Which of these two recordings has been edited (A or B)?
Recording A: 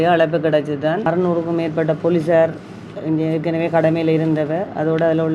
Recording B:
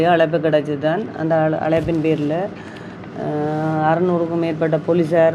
A